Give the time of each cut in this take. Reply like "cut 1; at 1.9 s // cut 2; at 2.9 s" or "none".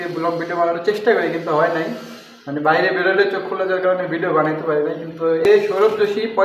cut 1; at 5.5 s